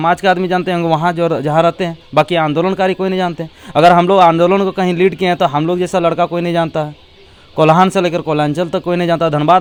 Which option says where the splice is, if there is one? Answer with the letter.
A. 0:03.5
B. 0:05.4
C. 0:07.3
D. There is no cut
D